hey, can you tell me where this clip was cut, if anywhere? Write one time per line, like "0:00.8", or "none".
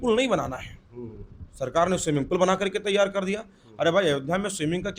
none